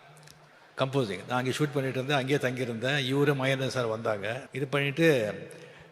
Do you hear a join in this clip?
yes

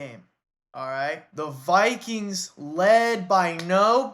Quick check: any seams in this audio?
yes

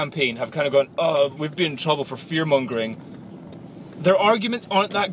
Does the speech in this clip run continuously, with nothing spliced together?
yes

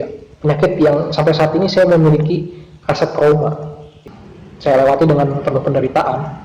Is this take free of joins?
no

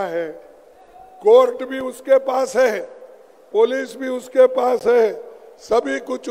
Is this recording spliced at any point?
no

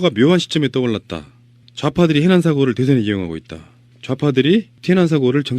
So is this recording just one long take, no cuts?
yes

